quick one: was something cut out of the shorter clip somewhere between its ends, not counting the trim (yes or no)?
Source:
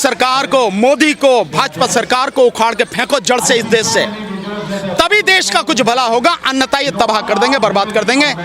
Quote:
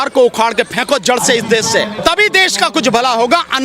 yes